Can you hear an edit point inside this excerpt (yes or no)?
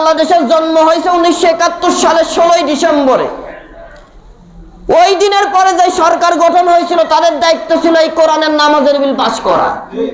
no